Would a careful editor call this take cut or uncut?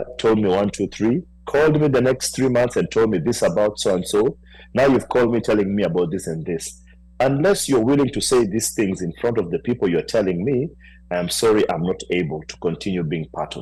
uncut